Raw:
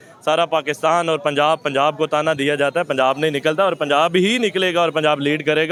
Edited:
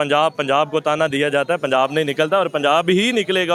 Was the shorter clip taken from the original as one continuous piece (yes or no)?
yes